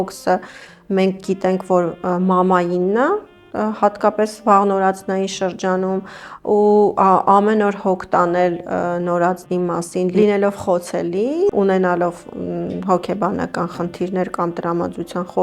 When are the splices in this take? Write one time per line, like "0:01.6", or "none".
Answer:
none